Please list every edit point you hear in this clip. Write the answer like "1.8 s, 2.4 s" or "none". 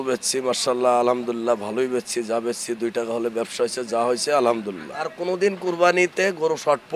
5.1 s